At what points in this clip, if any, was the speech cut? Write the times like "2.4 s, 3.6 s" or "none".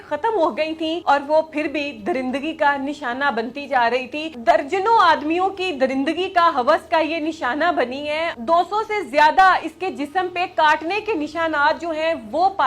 1.0 s, 4.2 s, 8.4 s

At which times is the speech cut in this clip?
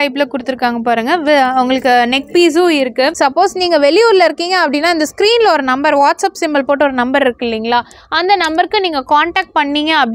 3.1 s

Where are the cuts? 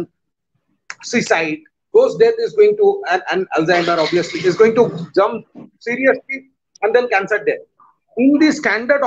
7.7 s

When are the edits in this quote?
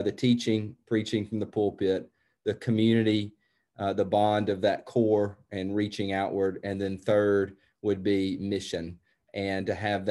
none

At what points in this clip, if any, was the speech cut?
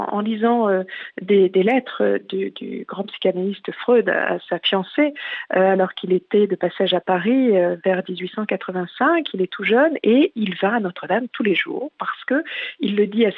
none

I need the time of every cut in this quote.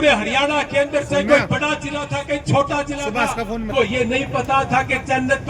3.7 s

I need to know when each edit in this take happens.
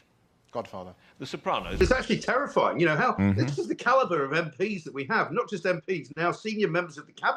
1.8 s

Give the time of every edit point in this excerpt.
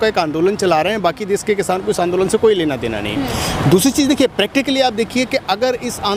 none

